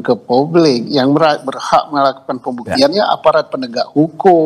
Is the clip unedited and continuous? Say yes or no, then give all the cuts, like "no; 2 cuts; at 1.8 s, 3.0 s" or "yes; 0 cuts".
yes; 0 cuts